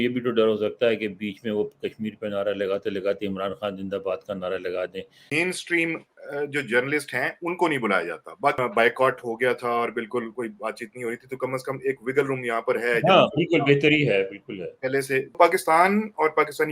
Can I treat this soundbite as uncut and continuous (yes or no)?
no